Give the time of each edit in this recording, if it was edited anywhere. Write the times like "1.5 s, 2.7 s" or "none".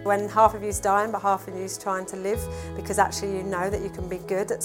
none

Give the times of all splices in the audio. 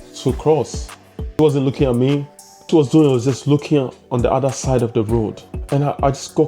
1.4 s, 2.7 s, 5.5 s

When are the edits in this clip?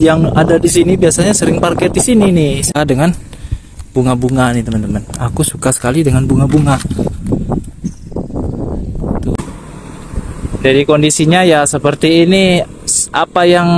2.8 s, 9.4 s

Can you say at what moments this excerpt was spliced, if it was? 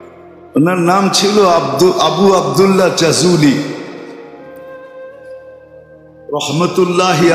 4.0 s, 5.9 s

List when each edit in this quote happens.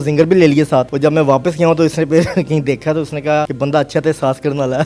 0.9 s, 3.5 s

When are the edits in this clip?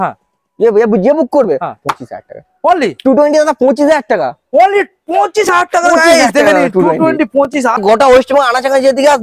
7.8 s

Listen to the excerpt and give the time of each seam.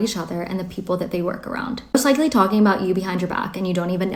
none

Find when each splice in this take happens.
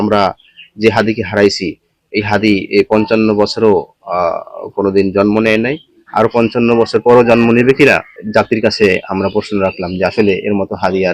8.1 s

